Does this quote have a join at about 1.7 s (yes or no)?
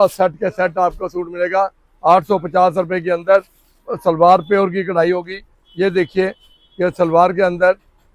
no